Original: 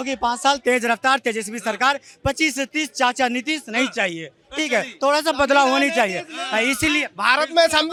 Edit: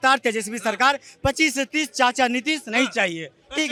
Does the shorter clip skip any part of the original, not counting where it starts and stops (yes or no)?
no